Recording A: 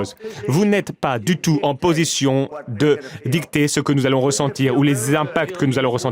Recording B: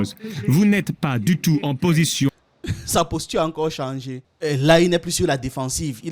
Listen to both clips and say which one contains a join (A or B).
A